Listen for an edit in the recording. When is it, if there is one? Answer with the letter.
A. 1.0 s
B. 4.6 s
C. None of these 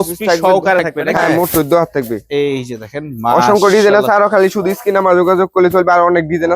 A